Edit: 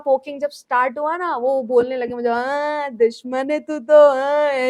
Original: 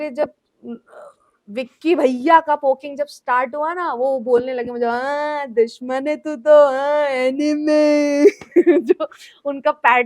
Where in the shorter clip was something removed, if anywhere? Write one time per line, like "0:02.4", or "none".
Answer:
none